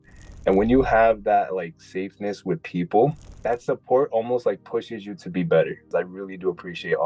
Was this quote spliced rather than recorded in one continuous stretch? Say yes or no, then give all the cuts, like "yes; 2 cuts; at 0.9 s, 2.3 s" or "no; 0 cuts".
yes; 2 cuts; at 3.3 s, 5.9 s